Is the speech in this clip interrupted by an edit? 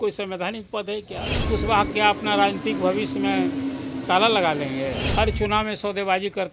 yes; 2 cuts; at 1.5 s, 5.0 s

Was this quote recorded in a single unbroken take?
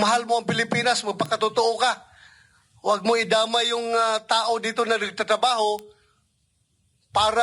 yes; 0 cuts

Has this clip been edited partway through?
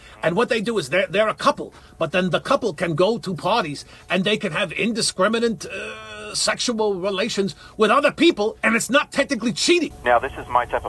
yes; 1 cut; at 10.0 s

